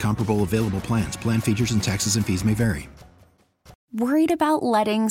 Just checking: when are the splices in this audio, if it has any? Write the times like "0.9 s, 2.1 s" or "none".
3.8 s